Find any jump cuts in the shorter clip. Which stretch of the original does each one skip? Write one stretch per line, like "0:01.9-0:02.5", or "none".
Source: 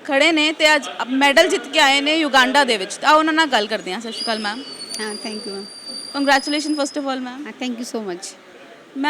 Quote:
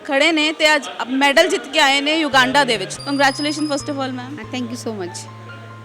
0:02.9-0:06.0